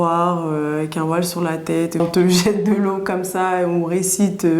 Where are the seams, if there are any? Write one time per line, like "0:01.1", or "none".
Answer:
0:02.0